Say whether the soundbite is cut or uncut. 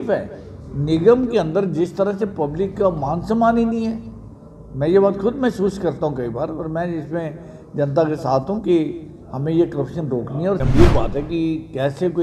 cut